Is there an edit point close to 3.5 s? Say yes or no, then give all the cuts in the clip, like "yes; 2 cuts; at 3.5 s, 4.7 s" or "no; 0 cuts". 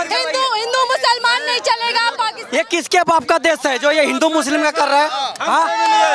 no; 1 cut; at 2.3 s